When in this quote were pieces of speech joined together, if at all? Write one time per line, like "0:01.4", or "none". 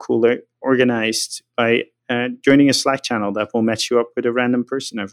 0:02.0